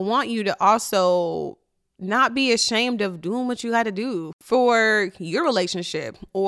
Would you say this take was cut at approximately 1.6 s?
no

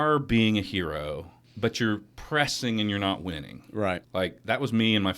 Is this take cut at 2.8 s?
no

